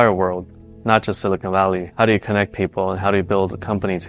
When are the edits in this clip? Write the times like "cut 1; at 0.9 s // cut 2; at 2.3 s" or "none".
none